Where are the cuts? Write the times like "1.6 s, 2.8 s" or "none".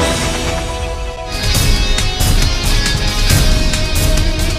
none